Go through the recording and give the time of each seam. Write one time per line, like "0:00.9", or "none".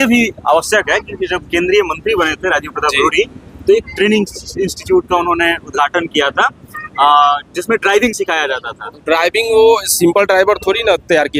none